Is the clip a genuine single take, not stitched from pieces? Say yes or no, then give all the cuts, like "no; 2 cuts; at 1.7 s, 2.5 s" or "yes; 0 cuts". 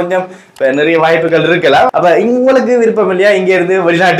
no; 1 cut; at 1.9 s